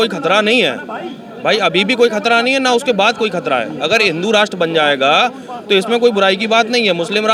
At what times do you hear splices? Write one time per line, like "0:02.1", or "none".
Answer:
none